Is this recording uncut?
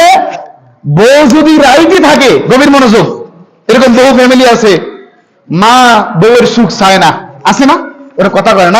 yes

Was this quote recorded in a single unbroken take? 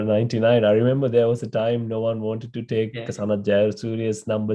yes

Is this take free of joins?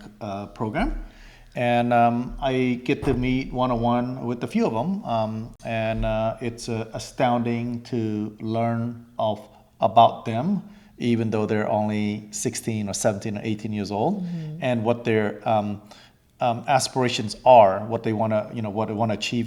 yes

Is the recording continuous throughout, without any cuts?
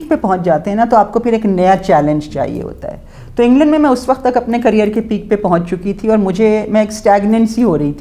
yes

